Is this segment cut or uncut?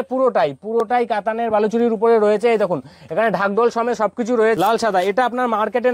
cut